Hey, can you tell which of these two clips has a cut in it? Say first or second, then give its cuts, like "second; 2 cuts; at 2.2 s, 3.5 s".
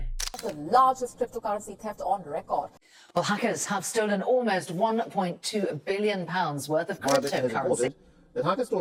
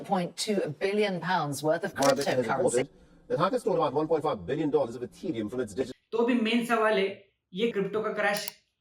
second; 1 cut; at 5.9 s